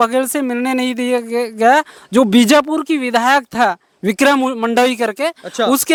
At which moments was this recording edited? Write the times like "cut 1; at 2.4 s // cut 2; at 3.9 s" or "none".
none